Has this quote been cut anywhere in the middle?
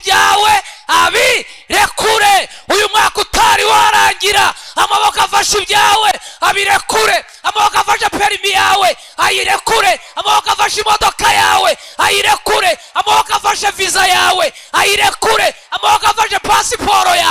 no; 0 cuts

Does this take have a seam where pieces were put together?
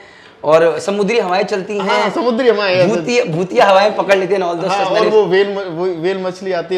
no; 0 cuts

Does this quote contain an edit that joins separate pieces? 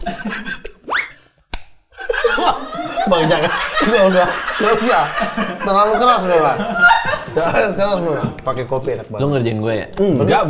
no; 0 cuts

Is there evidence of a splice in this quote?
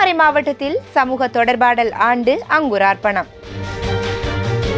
yes; 1 cut; at 3.6 s

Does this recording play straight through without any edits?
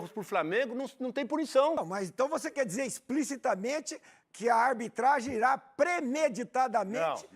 no; 1 cut; at 1.8 s

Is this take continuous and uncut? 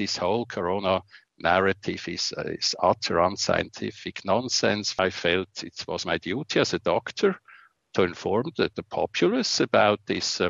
no; 1 cut; at 5.0 s

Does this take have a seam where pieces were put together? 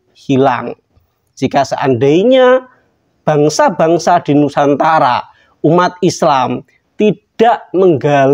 no; 0 cuts

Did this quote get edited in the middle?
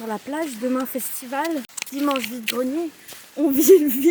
yes; 1 cut; at 1.8 s

